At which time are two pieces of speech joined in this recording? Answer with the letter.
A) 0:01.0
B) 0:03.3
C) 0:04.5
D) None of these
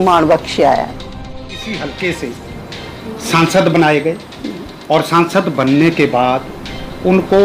A